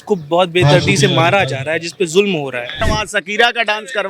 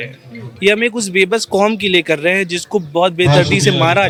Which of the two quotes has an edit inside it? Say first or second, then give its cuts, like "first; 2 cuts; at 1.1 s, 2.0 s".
first; 1 cut; at 2.8 s